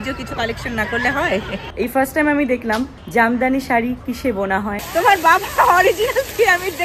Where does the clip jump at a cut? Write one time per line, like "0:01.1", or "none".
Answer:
0:01.6
0:03.0
0:04.8

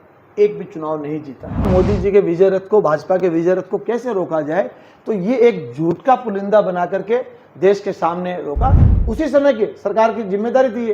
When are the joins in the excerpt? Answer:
0:01.6
0:08.9

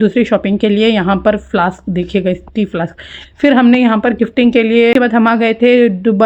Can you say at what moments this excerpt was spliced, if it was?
0:04.9

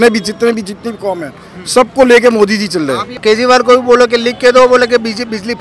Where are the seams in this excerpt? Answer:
0:03.1

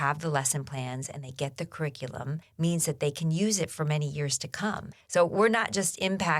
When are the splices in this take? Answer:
0:02.5
0:04.9

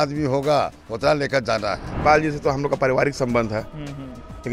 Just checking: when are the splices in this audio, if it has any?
0:02.0

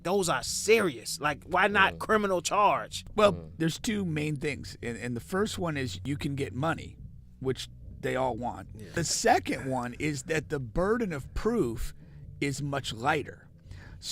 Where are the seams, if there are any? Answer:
0:03.0
0:09.1

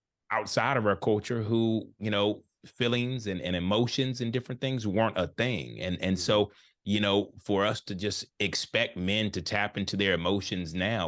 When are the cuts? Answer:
none

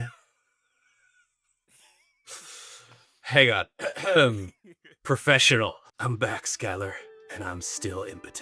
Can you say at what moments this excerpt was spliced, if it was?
none

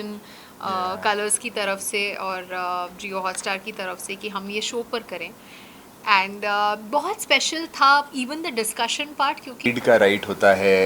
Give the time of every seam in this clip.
0:09.7

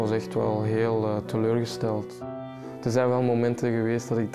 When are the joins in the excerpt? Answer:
0:02.7

